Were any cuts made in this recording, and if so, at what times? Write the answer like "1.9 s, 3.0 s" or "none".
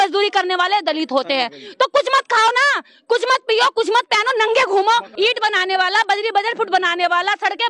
5.1 s